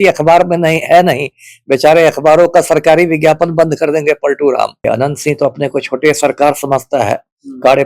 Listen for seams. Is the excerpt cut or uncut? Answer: cut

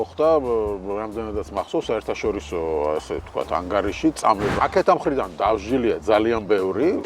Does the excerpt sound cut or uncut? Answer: cut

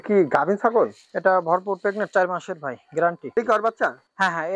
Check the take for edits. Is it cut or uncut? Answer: cut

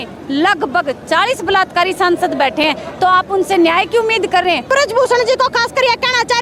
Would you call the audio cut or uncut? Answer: cut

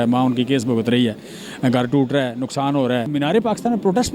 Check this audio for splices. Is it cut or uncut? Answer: cut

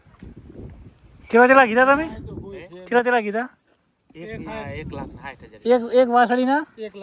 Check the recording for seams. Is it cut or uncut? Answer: uncut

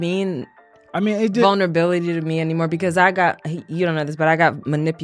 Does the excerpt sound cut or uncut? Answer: uncut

